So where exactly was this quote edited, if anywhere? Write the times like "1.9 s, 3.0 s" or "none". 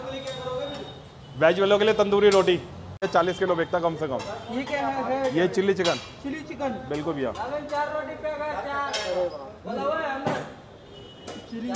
3.0 s